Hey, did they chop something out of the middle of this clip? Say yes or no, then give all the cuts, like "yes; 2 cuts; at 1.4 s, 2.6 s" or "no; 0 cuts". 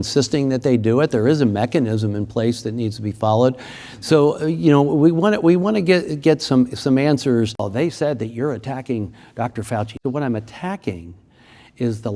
yes; 2 cuts; at 7.7 s, 10.0 s